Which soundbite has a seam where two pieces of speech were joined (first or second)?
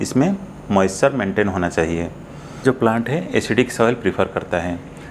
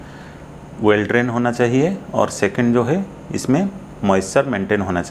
first